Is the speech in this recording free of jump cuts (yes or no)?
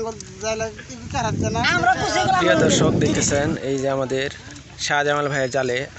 no